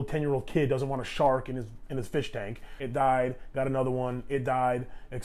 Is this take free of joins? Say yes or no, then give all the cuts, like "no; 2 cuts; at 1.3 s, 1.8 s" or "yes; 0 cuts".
no; 1 cut; at 2.7 s